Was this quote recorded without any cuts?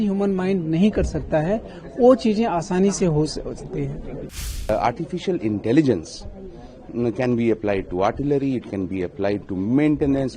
no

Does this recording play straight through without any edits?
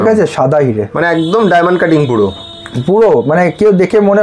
yes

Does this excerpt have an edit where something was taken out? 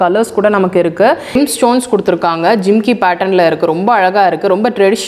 yes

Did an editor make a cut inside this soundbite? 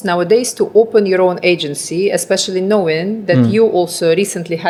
no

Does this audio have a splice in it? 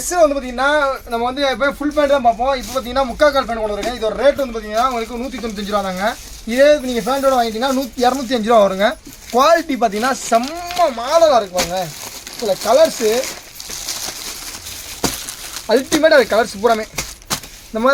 no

